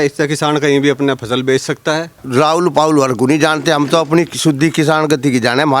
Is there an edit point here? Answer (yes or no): yes